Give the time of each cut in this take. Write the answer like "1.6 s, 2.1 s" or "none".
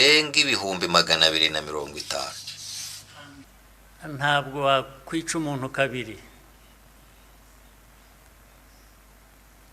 3.4 s

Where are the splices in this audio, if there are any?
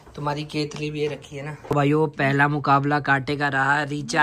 1.5 s

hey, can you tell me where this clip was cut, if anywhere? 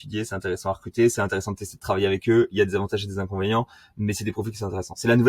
none

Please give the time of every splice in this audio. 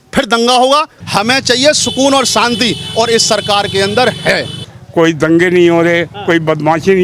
1.0 s, 4.6 s

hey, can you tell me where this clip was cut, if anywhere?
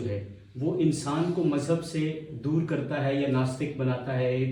none

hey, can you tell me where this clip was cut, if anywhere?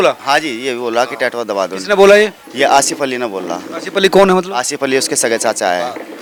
none

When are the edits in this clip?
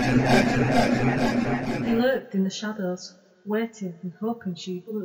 1.8 s

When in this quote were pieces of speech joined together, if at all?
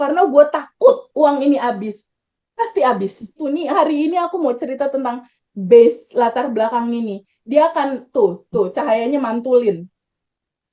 3.3 s

